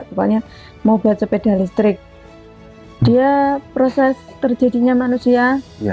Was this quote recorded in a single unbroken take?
no; 1 cut; at 2.4 s

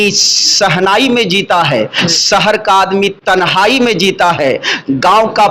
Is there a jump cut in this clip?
no; 0 cuts

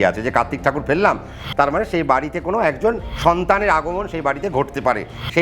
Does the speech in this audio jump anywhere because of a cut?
yes; 2 cuts; at 1.4 s, 3.1 s

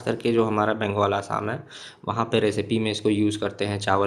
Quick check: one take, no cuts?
yes; 0 cuts

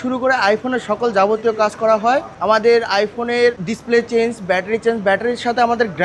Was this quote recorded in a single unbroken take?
yes; 0 cuts

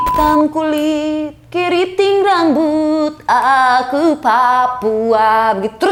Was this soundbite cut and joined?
no; 0 cuts

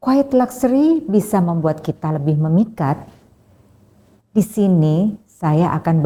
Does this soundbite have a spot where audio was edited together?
no; 0 cuts

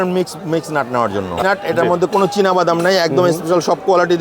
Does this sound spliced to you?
yes; 1 cut; at 1.3 s

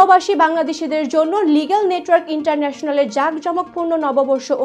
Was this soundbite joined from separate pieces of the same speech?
no; 0 cuts

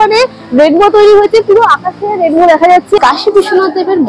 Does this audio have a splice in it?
yes; 1 cut; at 3.0 s

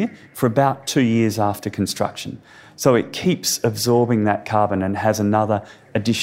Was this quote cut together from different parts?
no; 0 cuts

